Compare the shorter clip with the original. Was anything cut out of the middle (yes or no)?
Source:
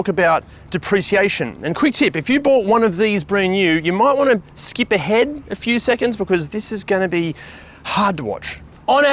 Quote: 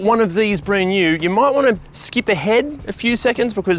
no